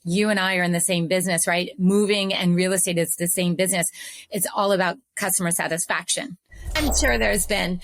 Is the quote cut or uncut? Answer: cut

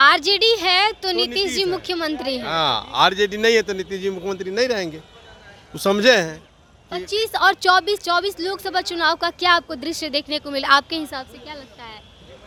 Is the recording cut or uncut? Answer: uncut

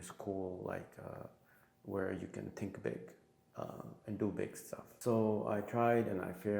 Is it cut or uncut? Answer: cut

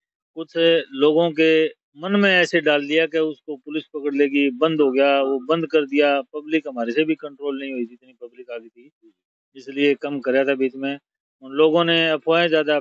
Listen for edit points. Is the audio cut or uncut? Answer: uncut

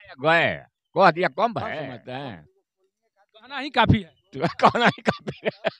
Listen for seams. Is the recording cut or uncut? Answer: cut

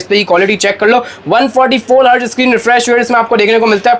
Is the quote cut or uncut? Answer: uncut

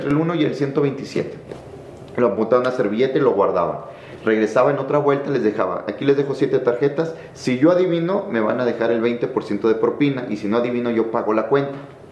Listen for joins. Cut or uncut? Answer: uncut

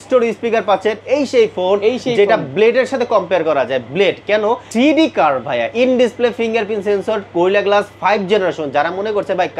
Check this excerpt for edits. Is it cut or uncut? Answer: cut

